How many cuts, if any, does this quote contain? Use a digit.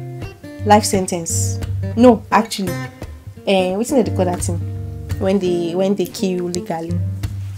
0